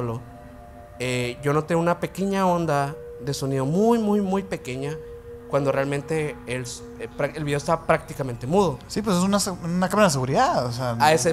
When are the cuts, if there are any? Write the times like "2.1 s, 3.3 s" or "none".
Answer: none